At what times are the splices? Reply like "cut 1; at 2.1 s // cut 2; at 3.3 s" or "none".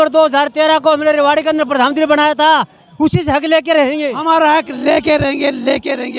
cut 1; at 4.1 s